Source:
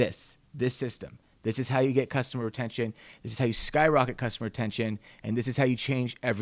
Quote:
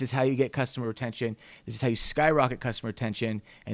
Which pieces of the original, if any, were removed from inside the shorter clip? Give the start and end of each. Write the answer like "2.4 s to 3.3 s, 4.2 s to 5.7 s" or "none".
none